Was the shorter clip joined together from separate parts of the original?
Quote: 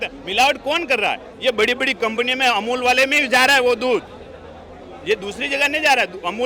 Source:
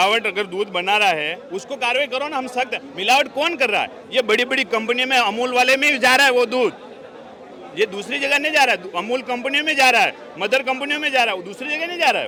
no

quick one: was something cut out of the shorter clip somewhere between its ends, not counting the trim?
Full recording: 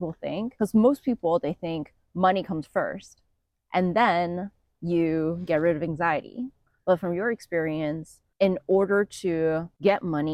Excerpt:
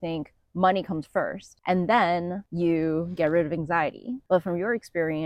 yes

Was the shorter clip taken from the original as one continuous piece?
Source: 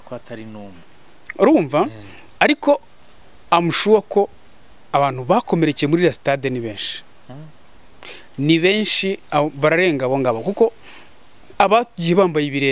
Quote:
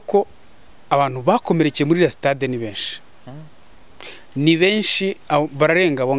yes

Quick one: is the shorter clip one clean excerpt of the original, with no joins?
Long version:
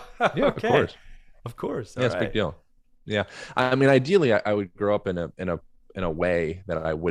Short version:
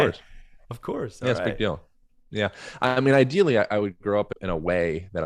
no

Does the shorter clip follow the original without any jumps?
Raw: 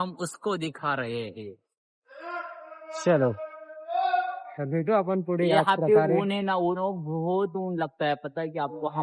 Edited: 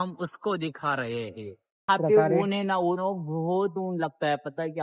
no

